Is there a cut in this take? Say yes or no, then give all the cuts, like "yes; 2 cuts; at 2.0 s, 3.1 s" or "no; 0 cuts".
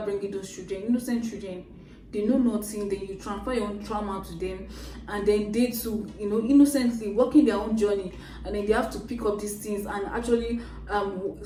no; 0 cuts